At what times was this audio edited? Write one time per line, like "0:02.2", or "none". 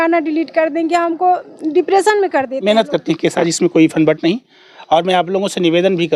0:02.6